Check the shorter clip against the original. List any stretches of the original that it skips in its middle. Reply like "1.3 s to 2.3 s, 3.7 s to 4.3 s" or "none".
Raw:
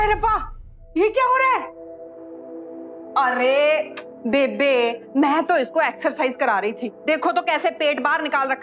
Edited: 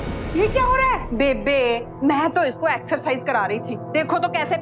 1.7 s to 4.2 s